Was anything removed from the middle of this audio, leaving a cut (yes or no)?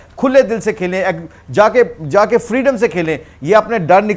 no